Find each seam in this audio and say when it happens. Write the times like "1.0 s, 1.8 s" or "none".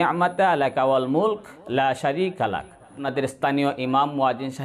3.0 s